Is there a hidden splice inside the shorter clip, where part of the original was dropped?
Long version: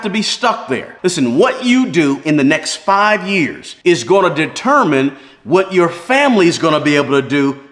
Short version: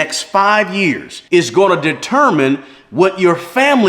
no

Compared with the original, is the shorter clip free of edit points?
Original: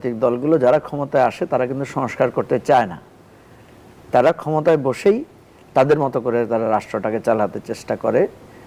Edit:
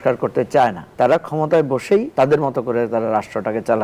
no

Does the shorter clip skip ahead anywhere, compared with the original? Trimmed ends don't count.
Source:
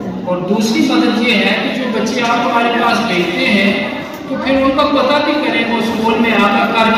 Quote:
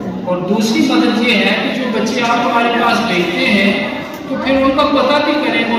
no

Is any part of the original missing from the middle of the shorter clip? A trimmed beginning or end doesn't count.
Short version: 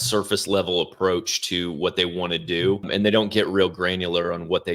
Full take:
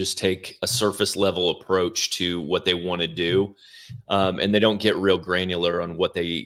yes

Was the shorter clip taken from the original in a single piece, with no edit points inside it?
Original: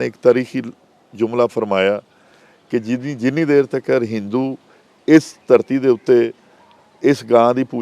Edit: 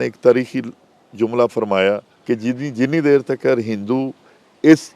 no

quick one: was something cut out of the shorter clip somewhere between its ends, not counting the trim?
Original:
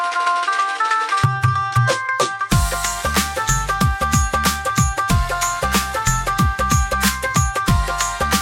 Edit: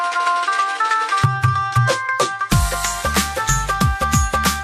no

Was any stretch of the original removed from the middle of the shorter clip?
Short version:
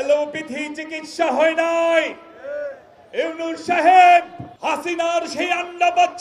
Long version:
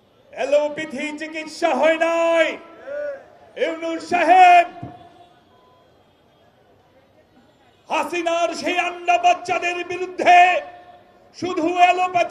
yes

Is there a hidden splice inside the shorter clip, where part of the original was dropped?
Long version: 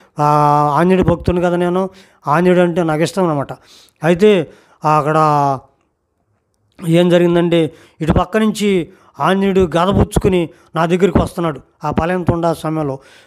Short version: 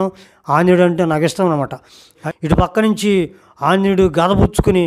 yes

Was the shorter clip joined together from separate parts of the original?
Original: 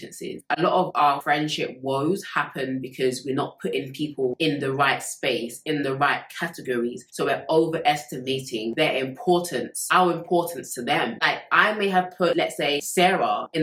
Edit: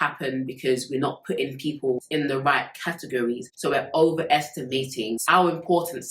yes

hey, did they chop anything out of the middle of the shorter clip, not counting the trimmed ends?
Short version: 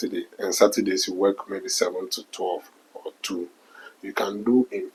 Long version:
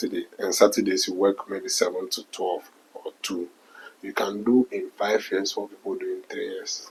no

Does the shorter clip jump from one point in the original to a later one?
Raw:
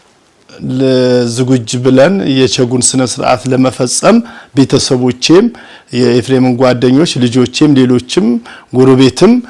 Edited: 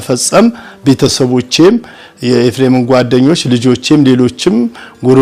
no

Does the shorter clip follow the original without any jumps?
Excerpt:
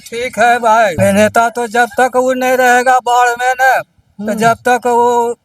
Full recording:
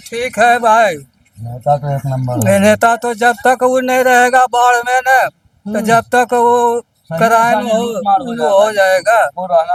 no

